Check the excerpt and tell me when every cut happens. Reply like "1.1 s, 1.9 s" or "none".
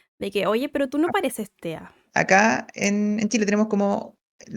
2.0 s